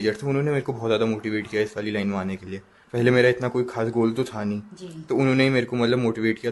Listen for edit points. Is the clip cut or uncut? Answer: uncut